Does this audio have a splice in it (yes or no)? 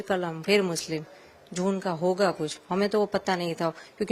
no